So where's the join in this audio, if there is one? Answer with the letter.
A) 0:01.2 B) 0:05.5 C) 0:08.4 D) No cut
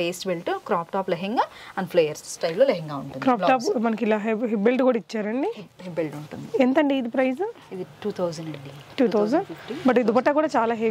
D